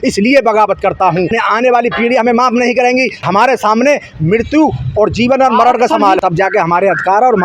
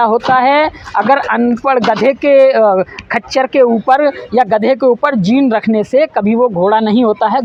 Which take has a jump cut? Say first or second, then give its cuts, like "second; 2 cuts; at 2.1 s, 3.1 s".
first; 3 cuts; at 1.3 s, 3.2 s, 6.2 s